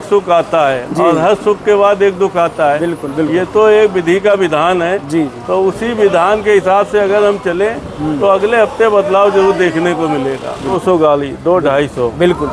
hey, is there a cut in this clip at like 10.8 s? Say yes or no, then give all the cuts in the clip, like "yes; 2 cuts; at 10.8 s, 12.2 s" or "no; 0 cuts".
yes; 1 cut; at 10.8 s